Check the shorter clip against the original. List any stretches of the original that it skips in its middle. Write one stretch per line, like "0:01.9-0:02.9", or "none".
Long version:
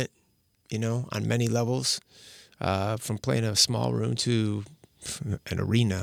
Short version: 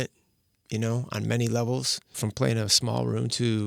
0:02.2-0:03.0